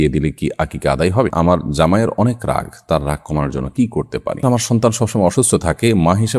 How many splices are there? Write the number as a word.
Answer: two